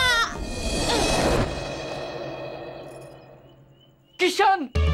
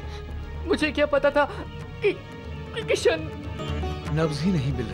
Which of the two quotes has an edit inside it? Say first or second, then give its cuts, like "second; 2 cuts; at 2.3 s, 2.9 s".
second; 1 cut; at 3.6 s